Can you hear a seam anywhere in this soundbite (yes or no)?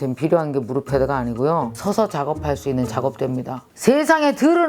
yes